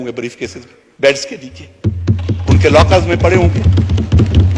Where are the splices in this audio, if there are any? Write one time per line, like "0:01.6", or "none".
none